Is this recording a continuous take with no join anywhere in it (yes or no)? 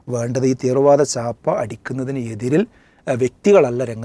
yes